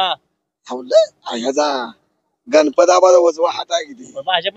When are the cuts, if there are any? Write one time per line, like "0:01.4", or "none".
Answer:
none